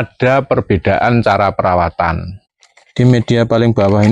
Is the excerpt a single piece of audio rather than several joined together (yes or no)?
no